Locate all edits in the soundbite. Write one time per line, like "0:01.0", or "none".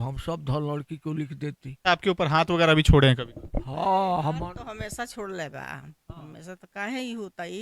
0:01.8